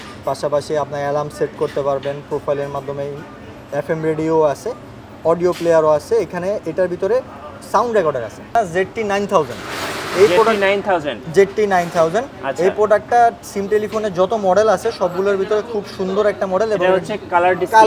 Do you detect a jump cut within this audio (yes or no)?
yes